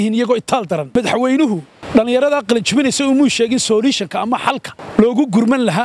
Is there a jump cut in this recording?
yes; 3 cuts; at 0.9 s, 1.7 s, 4.7 s

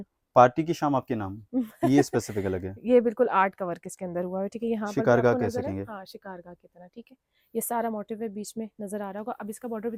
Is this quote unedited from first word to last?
yes; 0 cuts

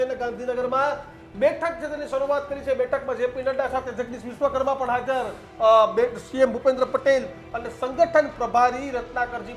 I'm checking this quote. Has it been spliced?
no; 0 cuts

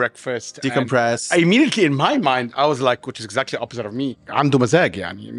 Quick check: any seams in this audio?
yes; 2 cuts; at 1.2 s, 4.2 s

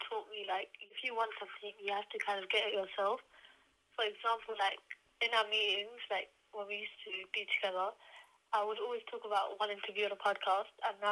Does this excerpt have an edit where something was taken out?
yes; 1 cut; at 1.0 s

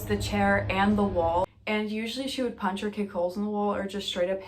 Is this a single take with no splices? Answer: no; 1 cut; at 1.6 s

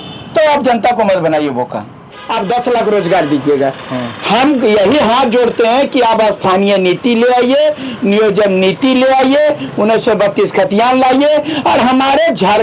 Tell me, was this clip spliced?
yes; 1 cut; at 2.2 s

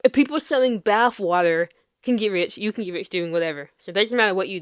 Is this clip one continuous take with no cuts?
no; 1 cut; at 1.9 s

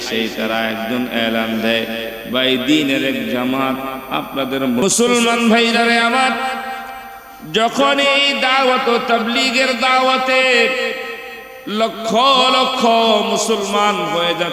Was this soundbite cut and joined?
yes; 1 cut; at 4.8 s

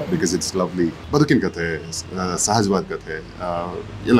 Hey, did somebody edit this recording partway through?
yes; 1 cut; at 1.0 s

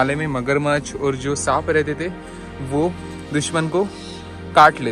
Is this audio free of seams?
yes; 0 cuts

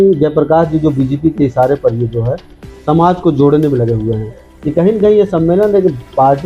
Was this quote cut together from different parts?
yes; 1 cut; at 4.5 s

